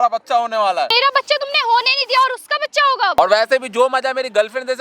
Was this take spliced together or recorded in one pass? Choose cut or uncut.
cut